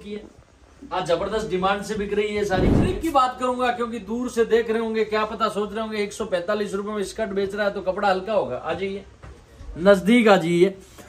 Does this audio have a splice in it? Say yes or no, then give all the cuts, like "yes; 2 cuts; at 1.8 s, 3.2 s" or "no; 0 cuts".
yes; 1 cut; at 3.0 s